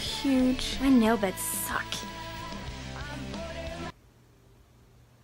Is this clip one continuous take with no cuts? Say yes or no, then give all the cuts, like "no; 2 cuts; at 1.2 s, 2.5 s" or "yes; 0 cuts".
no; 1 cut; at 3.9 s